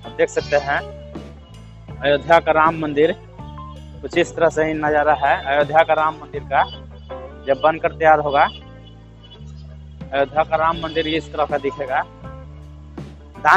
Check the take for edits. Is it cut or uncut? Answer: uncut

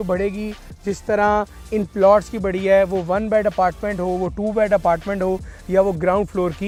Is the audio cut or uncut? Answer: uncut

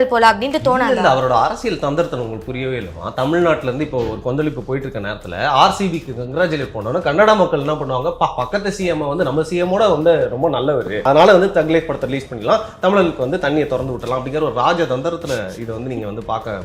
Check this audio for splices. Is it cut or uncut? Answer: cut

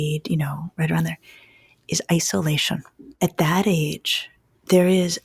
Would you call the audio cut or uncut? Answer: cut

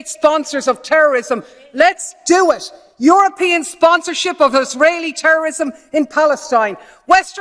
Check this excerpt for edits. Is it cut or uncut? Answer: cut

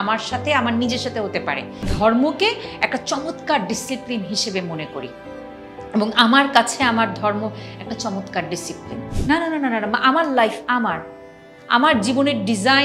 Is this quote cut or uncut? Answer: cut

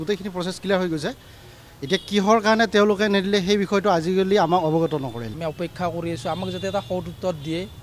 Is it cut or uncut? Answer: cut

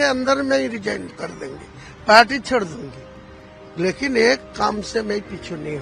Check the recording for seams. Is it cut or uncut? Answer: uncut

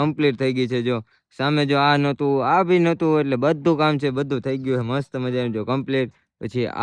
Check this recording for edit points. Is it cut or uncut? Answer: uncut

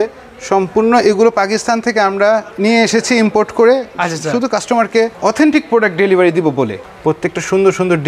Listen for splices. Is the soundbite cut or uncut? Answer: cut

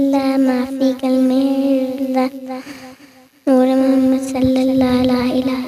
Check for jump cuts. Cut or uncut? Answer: uncut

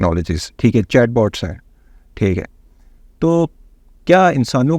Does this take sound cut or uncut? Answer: uncut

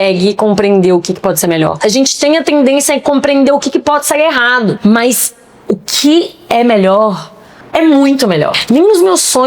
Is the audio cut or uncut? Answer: cut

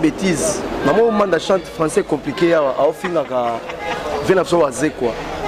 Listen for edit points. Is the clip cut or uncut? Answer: uncut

